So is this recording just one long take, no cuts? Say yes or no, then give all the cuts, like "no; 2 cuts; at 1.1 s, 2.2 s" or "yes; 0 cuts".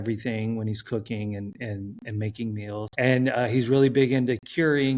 yes; 0 cuts